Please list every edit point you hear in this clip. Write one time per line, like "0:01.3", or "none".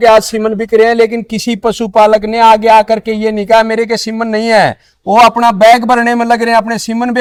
none